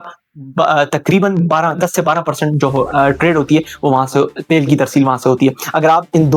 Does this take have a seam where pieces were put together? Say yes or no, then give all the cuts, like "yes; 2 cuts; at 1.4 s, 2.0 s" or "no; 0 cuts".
no; 0 cuts